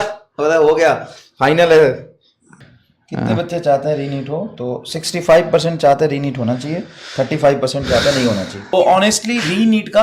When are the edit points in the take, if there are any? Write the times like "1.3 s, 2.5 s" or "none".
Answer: 2.5 s, 8.7 s